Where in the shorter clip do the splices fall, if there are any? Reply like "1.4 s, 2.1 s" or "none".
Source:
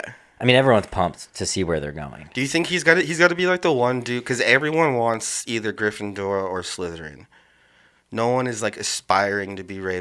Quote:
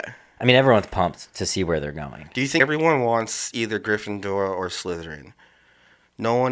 2.6 s